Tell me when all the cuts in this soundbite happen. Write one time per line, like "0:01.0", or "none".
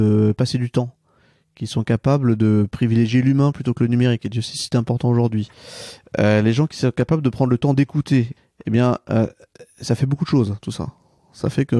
0:08.4